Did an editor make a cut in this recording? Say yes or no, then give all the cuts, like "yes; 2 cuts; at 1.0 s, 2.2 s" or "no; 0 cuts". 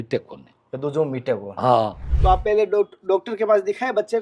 yes; 1 cut; at 2.0 s